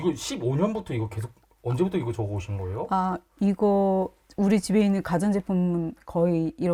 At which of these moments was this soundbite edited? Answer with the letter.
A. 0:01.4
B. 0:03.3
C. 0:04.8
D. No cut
D